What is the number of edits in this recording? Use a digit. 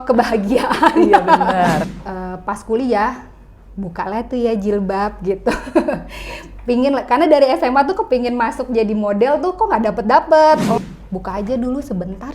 2